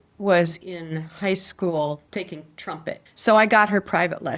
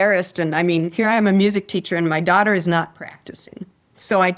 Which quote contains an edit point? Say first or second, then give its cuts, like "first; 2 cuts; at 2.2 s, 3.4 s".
first; 1 cut; at 3.0 s